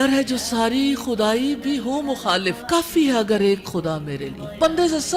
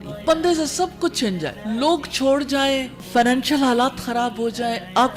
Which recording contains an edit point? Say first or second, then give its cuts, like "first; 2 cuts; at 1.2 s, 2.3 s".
second; 1 cut; at 2.9 s